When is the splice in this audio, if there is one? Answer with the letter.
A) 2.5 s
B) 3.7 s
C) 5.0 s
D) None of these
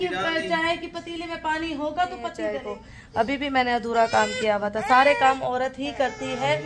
A